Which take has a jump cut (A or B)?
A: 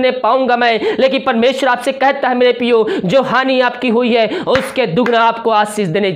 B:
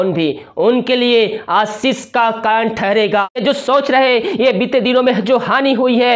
B